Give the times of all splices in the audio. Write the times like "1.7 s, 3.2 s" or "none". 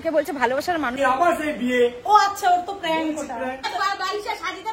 0.9 s, 3.6 s